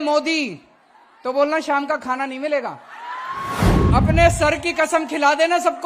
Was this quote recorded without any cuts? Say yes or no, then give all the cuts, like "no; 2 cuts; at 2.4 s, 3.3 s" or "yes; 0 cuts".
no; 1 cut; at 3.9 s